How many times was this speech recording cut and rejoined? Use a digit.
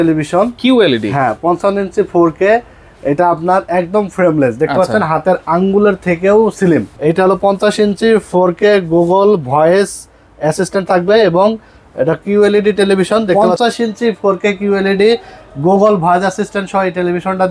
2